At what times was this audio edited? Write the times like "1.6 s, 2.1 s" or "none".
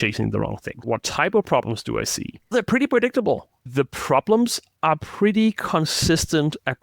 0.8 s, 2.5 s, 3.6 s

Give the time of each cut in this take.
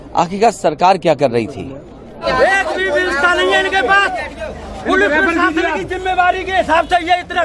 2.2 s

